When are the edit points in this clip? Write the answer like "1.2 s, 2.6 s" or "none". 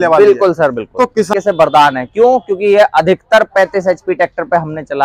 1.3 s